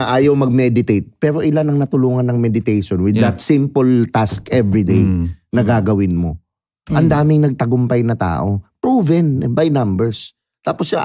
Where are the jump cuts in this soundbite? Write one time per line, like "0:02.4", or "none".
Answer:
none